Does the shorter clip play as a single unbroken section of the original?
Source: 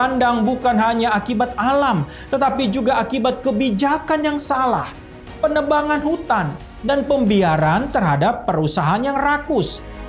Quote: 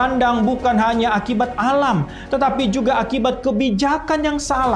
yes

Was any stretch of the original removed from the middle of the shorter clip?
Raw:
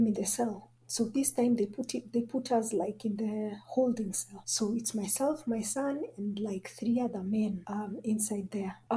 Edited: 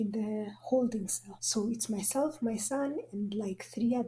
no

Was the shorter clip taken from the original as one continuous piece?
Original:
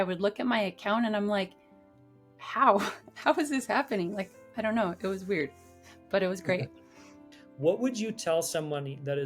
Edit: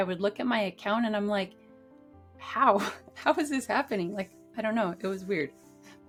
yes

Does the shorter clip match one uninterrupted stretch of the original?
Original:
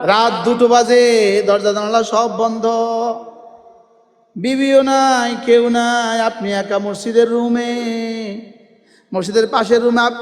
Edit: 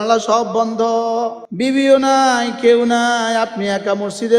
no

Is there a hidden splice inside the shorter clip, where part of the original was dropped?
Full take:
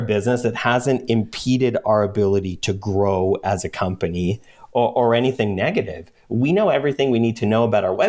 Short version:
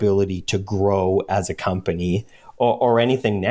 no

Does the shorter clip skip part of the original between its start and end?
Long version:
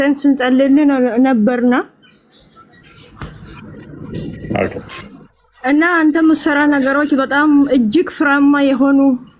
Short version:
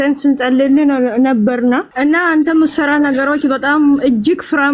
yes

